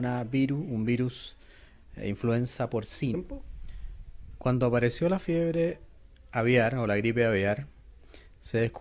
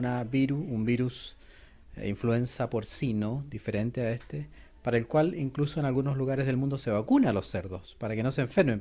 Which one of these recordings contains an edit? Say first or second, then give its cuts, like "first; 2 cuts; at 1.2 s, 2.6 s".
second; 1 cut; at 3.1 s